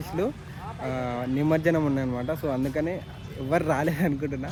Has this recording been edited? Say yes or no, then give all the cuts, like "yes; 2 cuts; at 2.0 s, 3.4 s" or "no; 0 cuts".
no; 0 cuts